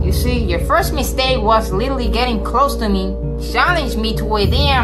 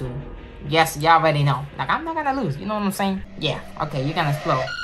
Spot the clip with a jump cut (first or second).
second